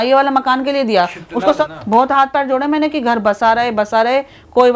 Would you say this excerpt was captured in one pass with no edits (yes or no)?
no